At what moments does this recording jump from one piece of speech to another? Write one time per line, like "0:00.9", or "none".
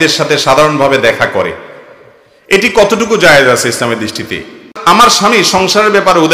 0:04.7

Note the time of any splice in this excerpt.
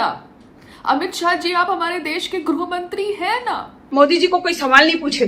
0:03.8

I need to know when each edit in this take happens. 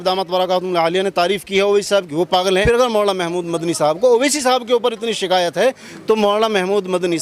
0:02.6

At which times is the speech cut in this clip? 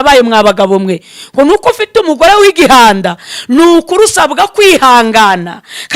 none

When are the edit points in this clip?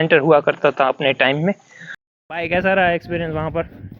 0:02.0

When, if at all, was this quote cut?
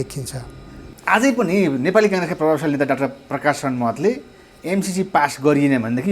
0:00.9

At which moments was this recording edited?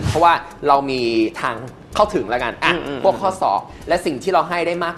none

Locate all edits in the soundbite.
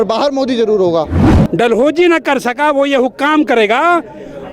0:01.2

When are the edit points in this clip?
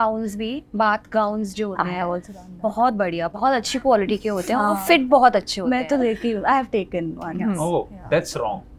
none

